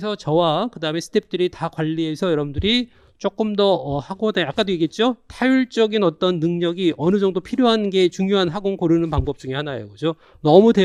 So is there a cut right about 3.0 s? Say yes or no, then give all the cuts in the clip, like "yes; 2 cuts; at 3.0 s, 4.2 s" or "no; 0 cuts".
no; 0 cuts